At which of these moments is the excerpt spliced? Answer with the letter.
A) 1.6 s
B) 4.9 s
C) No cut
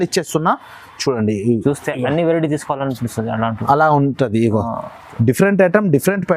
C